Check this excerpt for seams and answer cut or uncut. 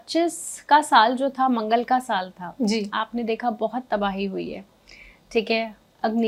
uncut